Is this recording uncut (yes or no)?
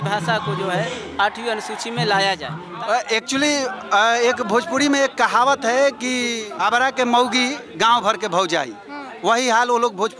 no